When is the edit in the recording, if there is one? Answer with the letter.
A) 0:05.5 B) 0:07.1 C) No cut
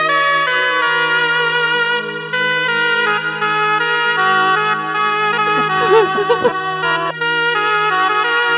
B